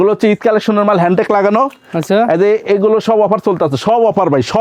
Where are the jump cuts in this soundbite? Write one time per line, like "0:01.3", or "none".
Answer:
none